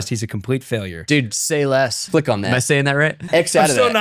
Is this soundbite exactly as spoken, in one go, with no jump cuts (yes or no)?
no